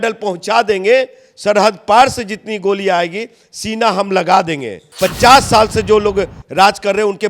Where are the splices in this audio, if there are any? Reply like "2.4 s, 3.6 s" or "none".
4.8 s